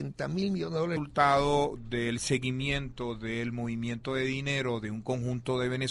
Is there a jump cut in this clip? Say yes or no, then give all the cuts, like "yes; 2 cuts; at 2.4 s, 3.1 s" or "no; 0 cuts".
no; 0 cuts